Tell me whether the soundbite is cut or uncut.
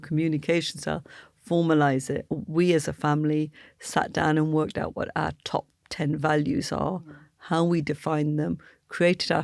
cut